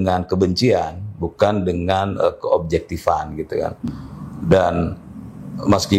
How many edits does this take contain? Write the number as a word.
zero